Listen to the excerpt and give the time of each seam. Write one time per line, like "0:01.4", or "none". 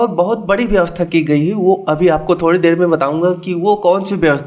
none